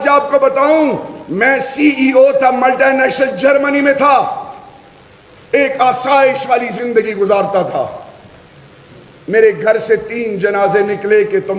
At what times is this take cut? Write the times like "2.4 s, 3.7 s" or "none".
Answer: none